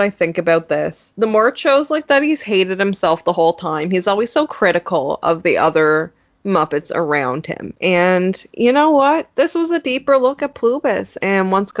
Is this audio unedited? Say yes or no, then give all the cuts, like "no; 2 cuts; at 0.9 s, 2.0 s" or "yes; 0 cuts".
yes; 0 cuts